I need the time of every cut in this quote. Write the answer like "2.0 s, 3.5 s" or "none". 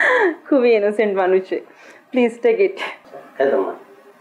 3.2 s